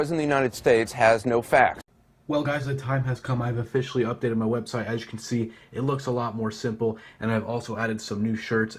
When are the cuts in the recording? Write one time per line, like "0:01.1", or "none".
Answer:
none